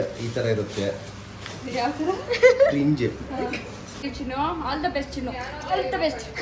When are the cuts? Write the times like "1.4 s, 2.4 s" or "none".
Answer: 4.2 s